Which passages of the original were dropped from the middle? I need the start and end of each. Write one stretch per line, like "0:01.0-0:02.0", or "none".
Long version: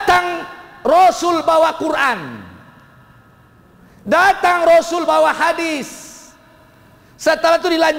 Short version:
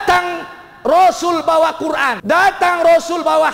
0:02.1-0:04.0